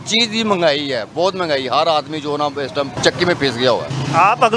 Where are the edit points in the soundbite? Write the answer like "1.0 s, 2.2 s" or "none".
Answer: 3.0 s